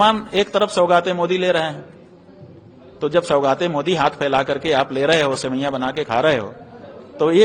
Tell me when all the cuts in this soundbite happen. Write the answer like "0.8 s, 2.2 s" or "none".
none